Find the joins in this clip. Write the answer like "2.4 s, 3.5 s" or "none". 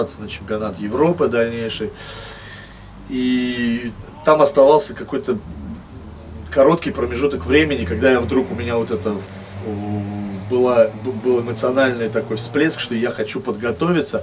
none